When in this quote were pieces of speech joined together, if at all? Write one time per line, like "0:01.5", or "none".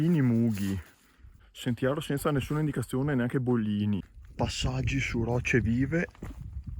0:04.0